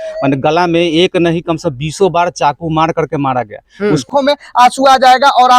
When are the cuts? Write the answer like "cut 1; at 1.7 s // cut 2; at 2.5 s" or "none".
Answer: cut 1; at 4.1 s